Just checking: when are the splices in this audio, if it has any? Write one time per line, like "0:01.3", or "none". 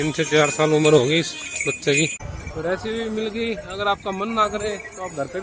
0:02.1